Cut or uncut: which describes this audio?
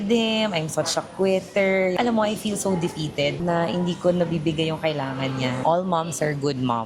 cut